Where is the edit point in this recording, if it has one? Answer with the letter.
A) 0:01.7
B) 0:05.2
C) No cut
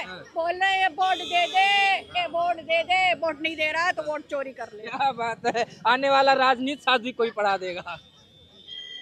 C